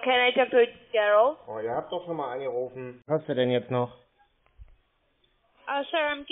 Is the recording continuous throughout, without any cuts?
no; 1 cut; at 3.0 s

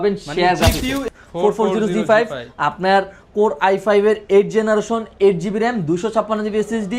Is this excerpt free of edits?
no; 1 cut; at 1.0 s

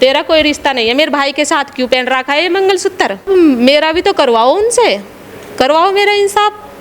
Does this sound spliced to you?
yes; 1 cut; at 3.2 s

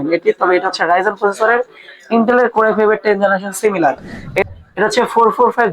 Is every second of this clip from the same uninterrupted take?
no; 1 cut; at 4.4 s

